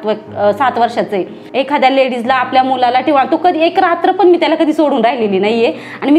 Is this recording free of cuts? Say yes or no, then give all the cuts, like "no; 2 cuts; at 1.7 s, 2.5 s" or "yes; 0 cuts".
no; 1 cut; at 1.4 s